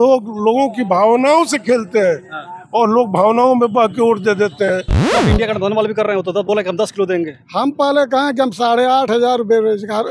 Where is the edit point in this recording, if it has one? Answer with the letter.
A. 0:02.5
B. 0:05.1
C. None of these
B